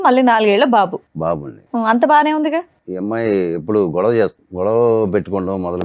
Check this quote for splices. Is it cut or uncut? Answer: cut